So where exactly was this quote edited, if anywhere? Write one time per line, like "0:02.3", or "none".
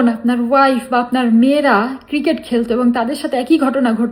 none